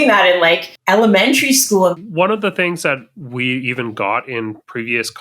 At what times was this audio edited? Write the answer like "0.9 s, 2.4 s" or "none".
2.0 s